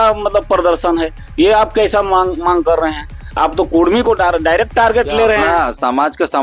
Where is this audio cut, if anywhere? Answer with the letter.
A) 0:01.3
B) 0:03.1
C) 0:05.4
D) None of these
C